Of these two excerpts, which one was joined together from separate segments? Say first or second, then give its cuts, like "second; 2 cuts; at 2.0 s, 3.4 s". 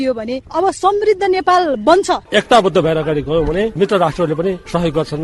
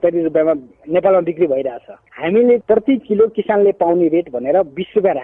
first; 2 cuts; at 2.2 s, 3.8 s